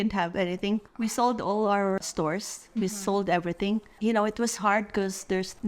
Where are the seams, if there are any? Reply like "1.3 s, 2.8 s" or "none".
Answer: 2.0 s, 4.0 s